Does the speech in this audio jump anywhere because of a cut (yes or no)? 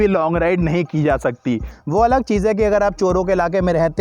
yes